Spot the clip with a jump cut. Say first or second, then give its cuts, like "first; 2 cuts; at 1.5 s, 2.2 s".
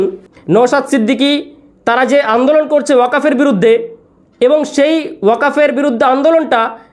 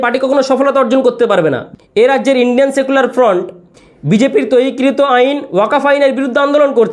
second; 1 cut; at 1.6 s